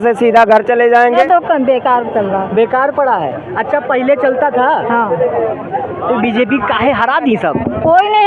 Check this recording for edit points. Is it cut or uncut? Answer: cut